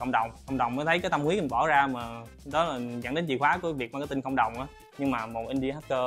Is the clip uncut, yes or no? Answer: no